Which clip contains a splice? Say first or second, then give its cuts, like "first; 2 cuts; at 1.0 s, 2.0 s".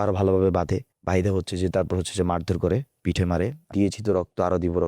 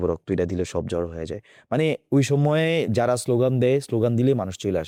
first; 2 cuts; at 0.9 s, 3.7 s